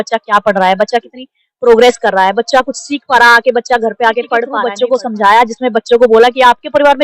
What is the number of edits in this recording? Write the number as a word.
one